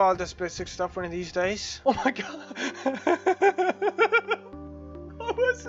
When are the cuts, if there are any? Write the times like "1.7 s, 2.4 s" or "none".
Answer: 1.7 s